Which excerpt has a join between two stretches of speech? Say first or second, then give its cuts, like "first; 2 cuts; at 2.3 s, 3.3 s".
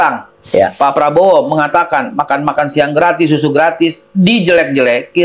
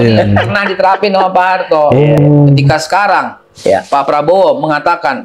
second; 1 cut; at 2.2 s